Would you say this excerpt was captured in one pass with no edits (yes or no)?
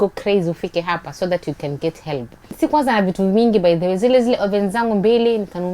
no